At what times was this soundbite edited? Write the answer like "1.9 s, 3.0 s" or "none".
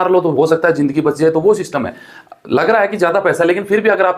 none